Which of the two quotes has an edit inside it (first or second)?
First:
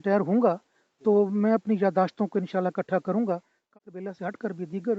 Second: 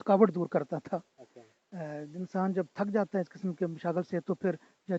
first